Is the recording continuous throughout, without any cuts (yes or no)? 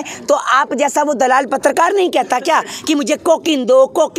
yes